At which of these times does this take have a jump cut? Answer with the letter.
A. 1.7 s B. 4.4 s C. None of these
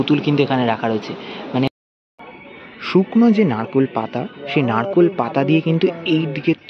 A